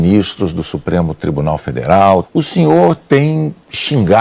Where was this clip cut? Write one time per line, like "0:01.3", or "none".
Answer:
none